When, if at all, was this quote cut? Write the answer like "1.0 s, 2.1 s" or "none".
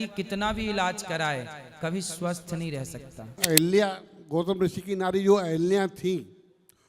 3.4 s

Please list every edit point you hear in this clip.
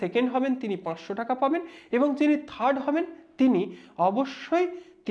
none

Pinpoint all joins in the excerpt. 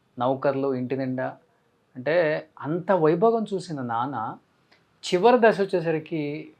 none

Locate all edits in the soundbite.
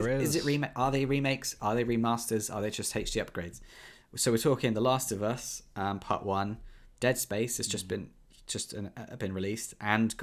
none

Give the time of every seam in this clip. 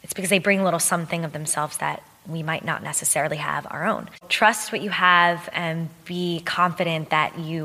4.3 s

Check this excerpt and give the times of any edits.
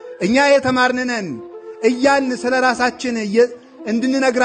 none

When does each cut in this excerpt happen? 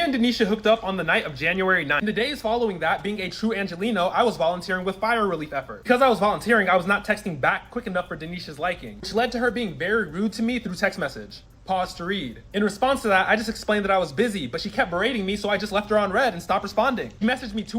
12.2 s

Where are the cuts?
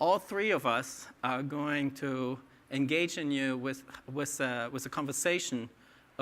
3.6 s

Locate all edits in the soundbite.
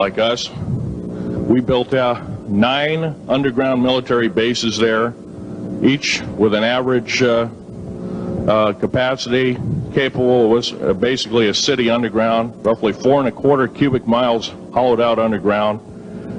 none

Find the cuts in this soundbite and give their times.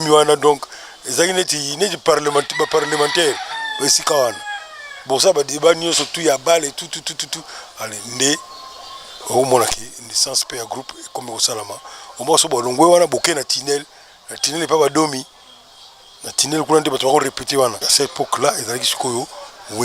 17.8 s

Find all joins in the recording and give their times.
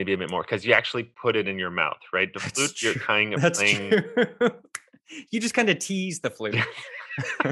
6.5 s

